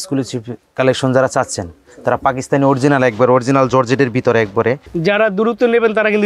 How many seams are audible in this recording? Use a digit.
1